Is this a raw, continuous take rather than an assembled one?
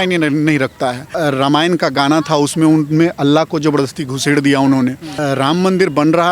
no; 2 cuts; at 1.0 s, 5.1 s

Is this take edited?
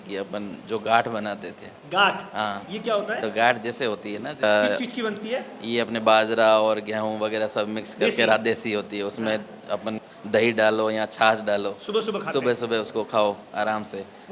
yes; 2 cuts; at 4.4 s, 10.0 s

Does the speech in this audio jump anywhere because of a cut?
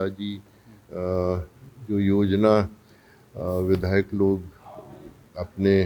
no; 0 cuts

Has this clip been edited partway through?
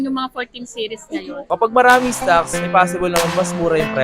yes; 1 cut; at 1.5 s

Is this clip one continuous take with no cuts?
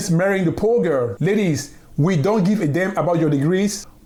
yes; 0 cuts

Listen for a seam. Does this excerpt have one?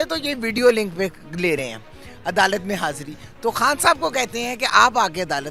no; 0 cuts

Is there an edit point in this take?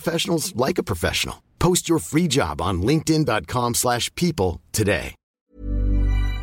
yes; 1 cut; at 5.3 s

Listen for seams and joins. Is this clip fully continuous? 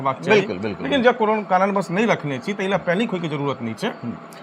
yes; 0 cuts

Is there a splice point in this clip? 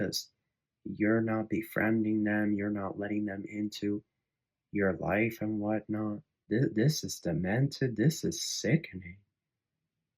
yes; 1 cut; at 6.3 s

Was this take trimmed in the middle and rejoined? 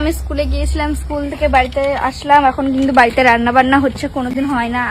yes; 1 cut; at 1.0 s

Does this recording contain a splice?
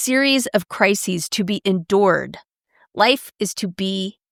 no; 0 cuts

